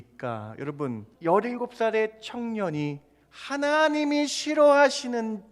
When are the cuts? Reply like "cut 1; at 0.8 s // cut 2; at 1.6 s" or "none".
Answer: cut 1; at 1.1 s